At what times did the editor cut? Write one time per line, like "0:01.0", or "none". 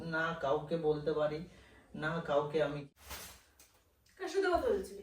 0:03.0

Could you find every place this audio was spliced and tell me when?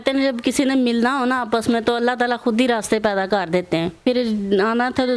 0:04.0

